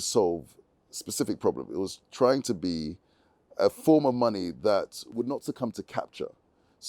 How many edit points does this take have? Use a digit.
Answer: 1